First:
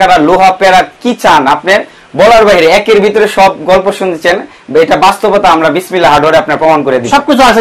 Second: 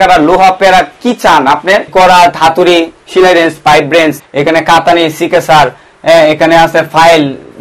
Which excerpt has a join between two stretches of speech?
second; 2 cuts; at 1.9 s, 4.2 s

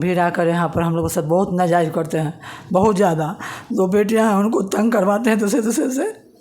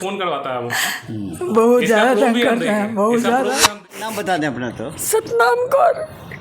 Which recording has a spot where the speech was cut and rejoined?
second; 1 cut; at 3.4 s

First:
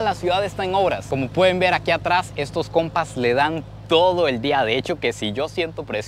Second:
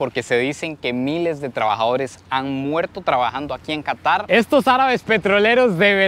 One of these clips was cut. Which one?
second; 1 cut; at 4.2 s

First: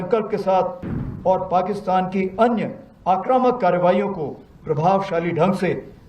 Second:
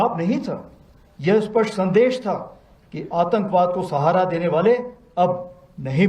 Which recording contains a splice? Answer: first; 1 cut; at 0.9 s

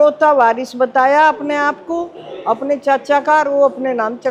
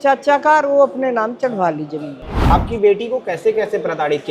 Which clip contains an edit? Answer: second; 1 cut; at 2.5 s

